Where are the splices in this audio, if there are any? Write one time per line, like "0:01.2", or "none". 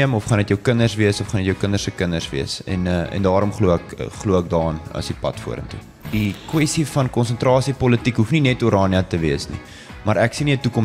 0:06.0